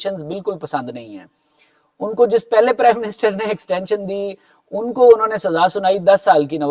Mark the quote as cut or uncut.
uncut